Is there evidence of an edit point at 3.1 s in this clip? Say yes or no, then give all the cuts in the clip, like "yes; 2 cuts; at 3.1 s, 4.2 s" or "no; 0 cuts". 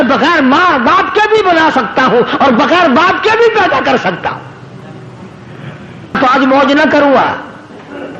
no; 1 cut; at 6.1 s